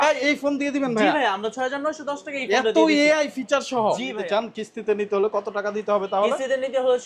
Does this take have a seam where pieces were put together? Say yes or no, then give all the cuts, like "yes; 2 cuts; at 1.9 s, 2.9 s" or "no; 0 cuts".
yes; 1 cut; at 4.2 s